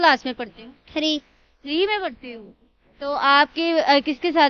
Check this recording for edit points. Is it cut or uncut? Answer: uncut